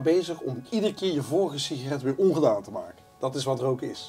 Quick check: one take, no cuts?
yes; 0 cuts

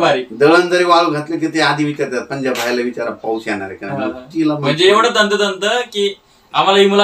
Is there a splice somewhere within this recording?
no; 0 cuts

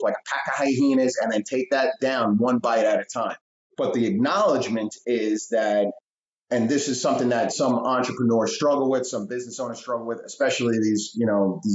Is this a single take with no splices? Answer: no; 1 cut; at 3.6 s

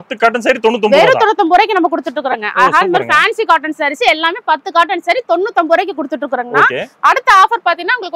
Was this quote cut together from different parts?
no; 0 cuts

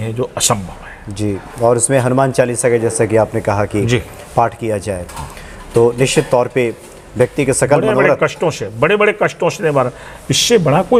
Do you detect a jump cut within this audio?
no; 0 cuts

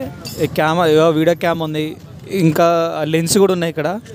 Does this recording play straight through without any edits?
yes; 0 cuts

